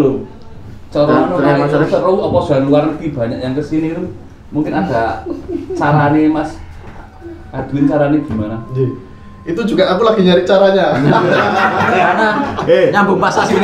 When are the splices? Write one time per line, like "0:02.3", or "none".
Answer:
none